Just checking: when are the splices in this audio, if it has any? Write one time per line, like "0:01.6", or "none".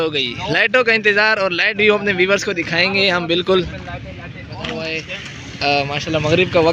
0:04.9